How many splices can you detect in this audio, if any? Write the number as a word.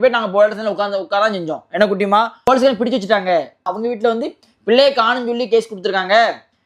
two